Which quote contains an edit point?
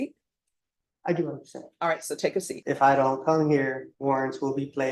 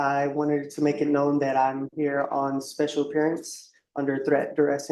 first; 2 cuts; at 2.5 s, 3.9 s

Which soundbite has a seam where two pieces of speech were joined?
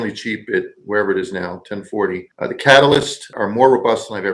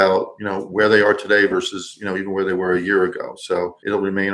first; 2 cuts; at 2.3 s, 3.3 s

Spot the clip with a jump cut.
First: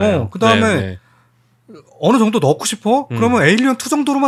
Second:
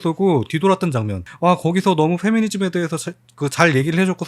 second; 1 cut; at 1.2 s

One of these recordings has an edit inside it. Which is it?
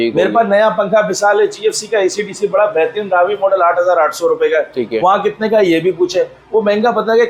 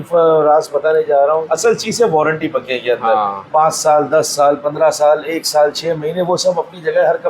second; 1 cut; at 1.4 s

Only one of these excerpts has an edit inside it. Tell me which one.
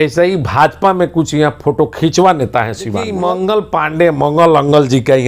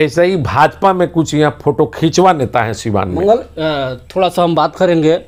first; 1 cut; at 3.0 s

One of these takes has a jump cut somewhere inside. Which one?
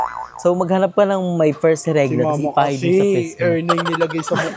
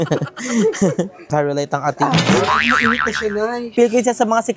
second; 2 cuts; at 1.2 s, 3.6 s

